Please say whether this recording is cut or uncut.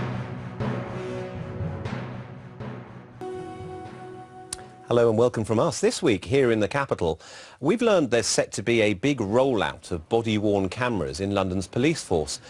cut